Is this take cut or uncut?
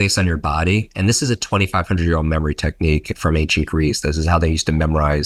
uncut